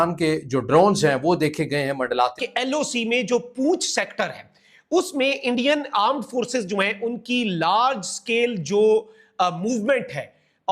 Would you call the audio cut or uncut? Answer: cut